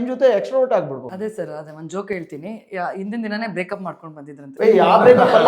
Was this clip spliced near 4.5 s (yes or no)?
yes